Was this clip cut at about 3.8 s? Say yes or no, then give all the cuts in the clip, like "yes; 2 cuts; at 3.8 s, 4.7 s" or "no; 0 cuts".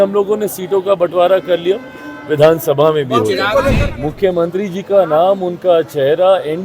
yes; 1 cut; at 3.8 s